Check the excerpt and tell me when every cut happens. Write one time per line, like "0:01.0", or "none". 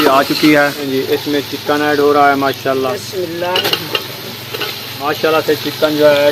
0:00.9
0:05.0